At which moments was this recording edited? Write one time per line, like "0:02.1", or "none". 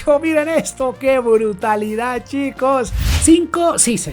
0:03.0